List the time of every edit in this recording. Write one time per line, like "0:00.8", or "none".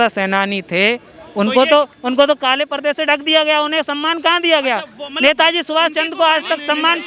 none